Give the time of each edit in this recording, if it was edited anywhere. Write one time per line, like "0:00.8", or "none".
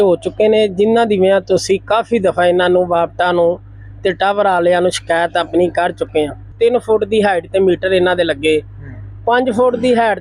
0:06.5

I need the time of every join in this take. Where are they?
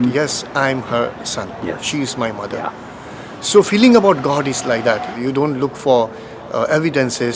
0:05.2

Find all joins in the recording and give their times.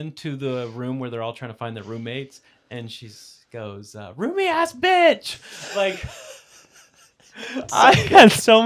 none

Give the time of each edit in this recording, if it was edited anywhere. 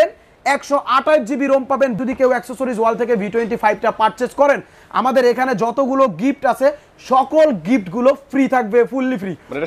0:02.0

